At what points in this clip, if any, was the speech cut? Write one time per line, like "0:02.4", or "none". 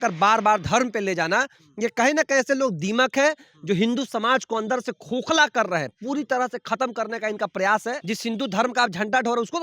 0:08.0